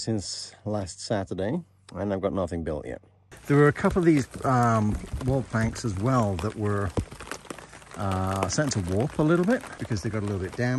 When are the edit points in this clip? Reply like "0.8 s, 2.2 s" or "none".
3.3 s, 9.7 s